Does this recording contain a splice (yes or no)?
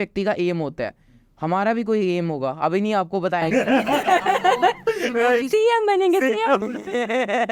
no